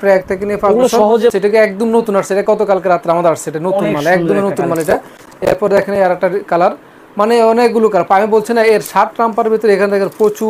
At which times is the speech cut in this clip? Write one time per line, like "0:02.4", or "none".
0:01.3